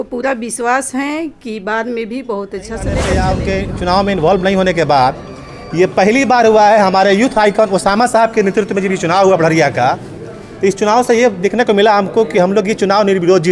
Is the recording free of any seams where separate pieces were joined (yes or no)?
no